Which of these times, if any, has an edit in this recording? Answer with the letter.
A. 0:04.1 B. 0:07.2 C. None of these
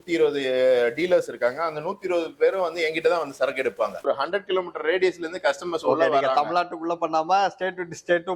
A